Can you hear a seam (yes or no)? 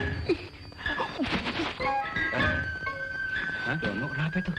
yes